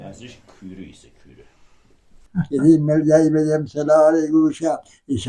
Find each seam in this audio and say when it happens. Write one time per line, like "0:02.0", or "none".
0:02.3